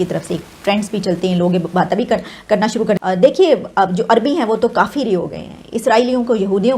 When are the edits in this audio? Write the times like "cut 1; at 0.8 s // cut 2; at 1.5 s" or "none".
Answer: cut 1; at 3.0 s